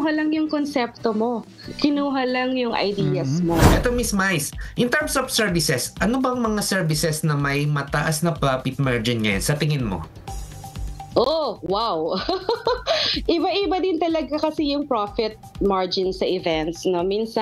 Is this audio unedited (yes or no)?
no